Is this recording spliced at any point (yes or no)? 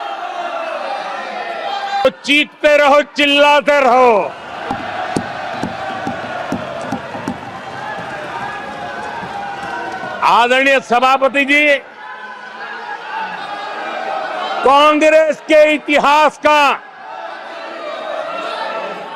yes